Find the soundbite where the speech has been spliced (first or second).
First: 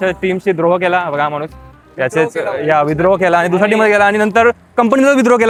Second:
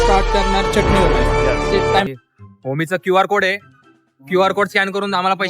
second